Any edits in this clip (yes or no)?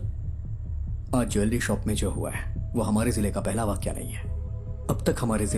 no